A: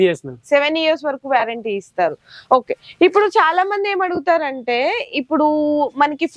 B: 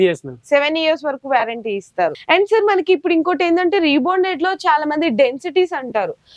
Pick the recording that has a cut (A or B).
B